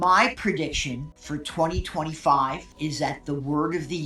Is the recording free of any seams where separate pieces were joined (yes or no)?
no